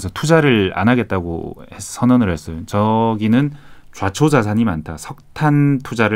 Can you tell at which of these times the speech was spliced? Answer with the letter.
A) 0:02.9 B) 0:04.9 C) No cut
C